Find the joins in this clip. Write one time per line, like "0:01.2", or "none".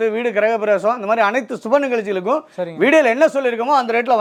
none